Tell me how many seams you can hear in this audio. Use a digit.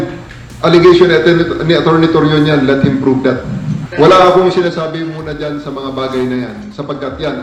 0